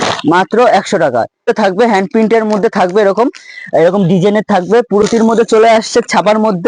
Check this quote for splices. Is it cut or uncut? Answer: cut